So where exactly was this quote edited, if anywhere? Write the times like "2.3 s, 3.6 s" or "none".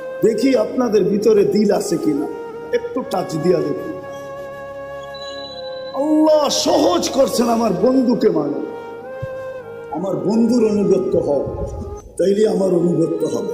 8.7 s, 9.9 s

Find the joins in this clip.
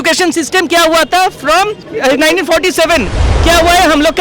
1.8 s

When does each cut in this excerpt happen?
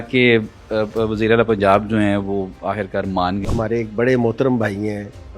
3.4 s

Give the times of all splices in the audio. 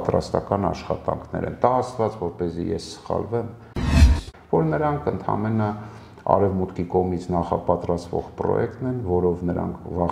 4.1 s

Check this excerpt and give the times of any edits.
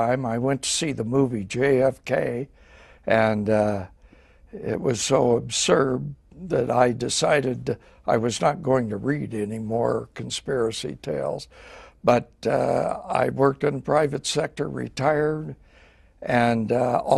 1.8 s

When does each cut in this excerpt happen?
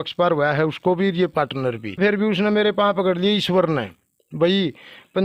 2.0 s

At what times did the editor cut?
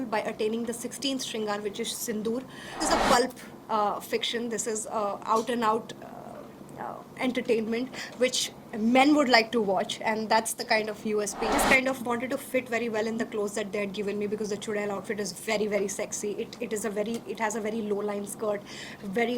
2.8 s, 11.5 s

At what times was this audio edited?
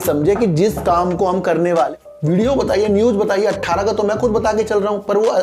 1.9 s

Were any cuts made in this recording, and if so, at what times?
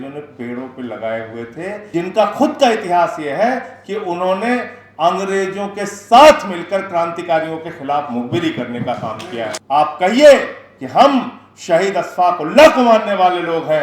1.8 s, 9.5 s

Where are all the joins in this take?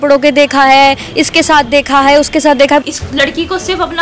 2.8 s

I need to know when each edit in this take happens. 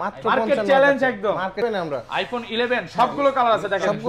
1.6 s

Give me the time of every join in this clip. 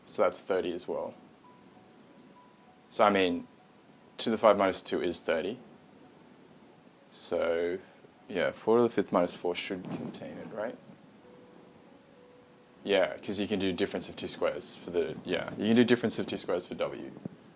12.4 s

